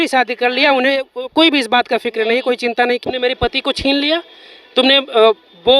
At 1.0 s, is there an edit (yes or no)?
no